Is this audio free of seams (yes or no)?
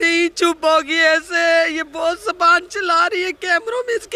yes